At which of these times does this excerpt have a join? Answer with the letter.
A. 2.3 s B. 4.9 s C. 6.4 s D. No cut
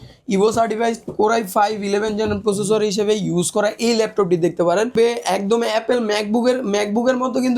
B